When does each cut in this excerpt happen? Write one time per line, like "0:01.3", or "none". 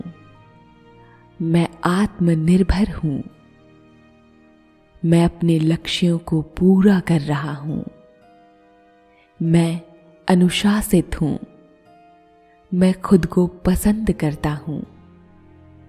0:07.9
0:09.3